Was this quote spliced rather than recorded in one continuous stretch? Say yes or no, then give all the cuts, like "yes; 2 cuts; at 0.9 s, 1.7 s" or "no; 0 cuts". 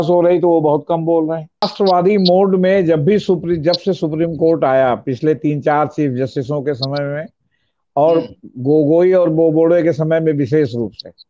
yes; 1 cut; at 1.7 s